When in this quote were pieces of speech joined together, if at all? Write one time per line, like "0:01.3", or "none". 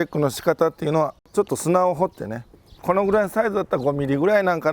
0:01.2
0:02.8